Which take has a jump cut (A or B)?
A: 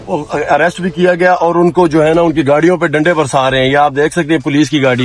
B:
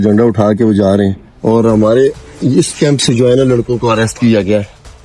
B